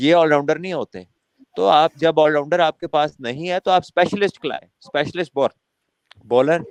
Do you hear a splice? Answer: no; 0 cuts

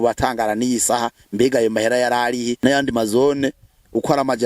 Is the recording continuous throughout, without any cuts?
no; 1 cut; at 2.5 s

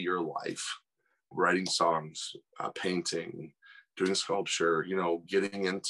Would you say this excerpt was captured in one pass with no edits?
yes; 0 cuts

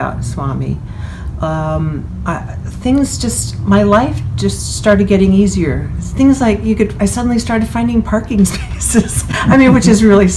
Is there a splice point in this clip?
no; 0 cuts

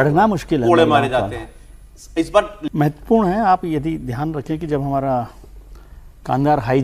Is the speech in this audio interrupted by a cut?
yes; 1 cut; at 2.6 s

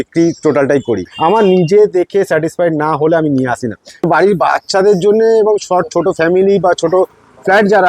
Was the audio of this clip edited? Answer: yes; 2 cuts; at 1.1 s, 4.1 s

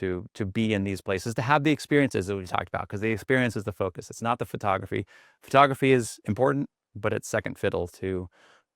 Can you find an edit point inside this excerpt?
no; 0 cuts

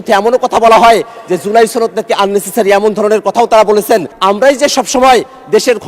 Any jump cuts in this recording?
yes; 1 cut; at 4.1 s

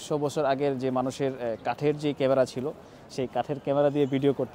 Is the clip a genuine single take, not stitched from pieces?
yes; 0 cuts

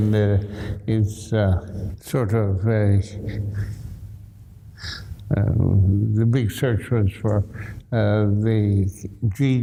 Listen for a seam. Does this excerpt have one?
no; 0 cuts

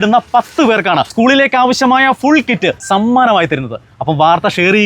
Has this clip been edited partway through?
yes; 2 cuts; at 1.1 s, 2.8 s

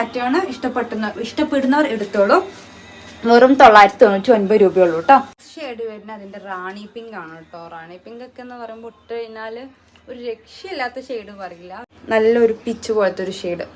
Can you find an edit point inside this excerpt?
yes; 2 cuts; at 5.4 s, 11.9 s

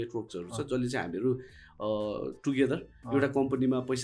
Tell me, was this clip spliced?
no; 0 cuts

